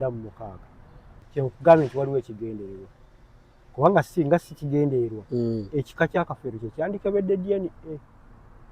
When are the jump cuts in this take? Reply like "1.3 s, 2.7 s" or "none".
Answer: 1.2 s